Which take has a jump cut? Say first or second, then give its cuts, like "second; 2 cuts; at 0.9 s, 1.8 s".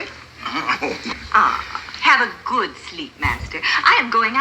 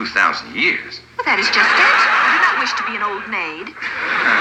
first; 1 cut; at 1.1 s